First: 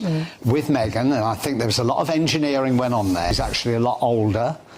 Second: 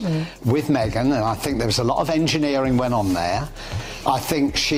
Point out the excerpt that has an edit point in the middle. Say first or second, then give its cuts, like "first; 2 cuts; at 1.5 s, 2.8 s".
first; 1 cut; at 3.3 s